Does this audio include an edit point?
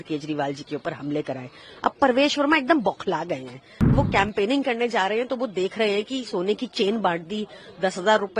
yes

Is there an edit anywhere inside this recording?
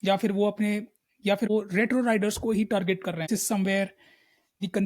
yes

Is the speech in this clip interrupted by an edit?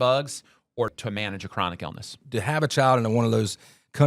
yes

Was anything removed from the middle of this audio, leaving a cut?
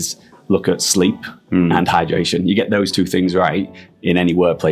no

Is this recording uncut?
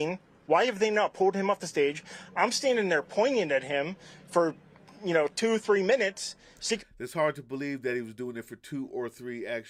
yes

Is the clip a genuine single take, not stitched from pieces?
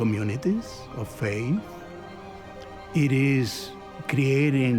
yes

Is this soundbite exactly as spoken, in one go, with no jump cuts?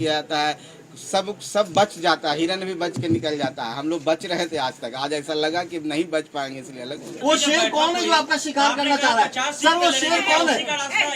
no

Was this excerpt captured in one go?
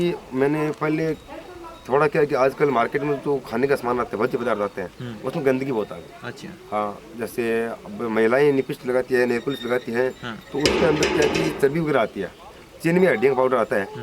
yes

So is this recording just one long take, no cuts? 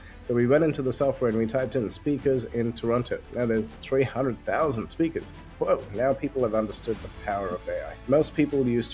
no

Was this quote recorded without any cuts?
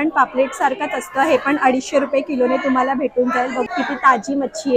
no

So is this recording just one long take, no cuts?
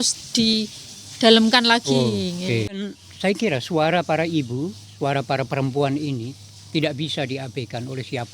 no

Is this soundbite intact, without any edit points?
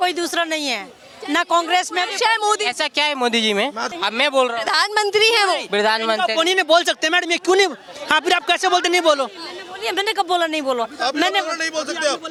yes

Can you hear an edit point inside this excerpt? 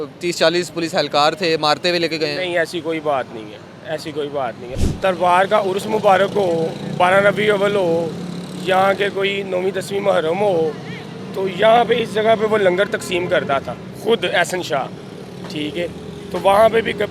yes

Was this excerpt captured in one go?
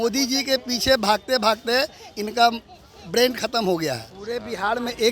no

